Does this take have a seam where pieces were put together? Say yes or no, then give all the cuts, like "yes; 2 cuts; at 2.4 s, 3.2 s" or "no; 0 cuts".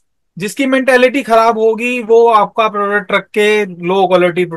no; 0 cuts